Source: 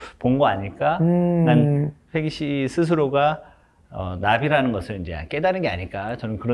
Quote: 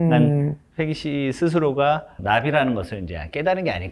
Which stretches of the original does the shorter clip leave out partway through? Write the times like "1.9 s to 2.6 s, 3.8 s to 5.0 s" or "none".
3.5 s to 4.1 s